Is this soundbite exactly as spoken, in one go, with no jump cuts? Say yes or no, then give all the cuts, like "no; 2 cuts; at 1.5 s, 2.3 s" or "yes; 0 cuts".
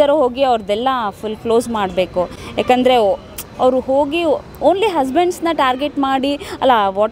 yes; 0 cuts